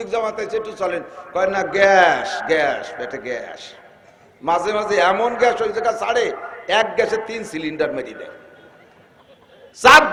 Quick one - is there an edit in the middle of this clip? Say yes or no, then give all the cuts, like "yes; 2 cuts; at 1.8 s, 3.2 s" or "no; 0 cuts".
no; 0 cuts